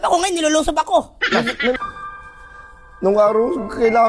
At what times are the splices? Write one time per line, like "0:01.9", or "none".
0:01.8